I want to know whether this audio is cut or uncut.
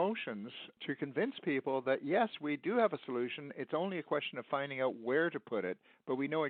uncut